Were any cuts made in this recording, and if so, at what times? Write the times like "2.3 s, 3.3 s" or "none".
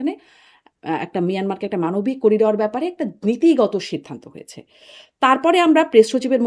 none